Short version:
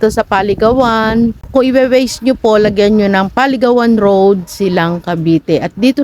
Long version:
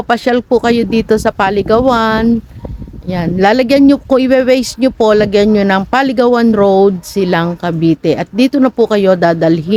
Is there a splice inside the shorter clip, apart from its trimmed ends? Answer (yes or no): yes